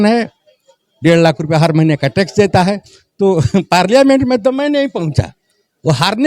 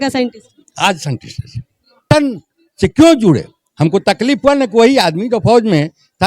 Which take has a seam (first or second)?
second